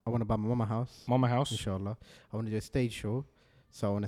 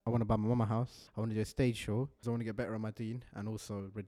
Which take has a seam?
second; 2 cuts; at 0.9 s, 2.2 s

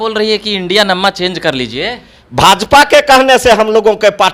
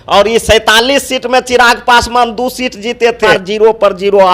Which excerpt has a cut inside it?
second; 1 cut; at 3.4 s

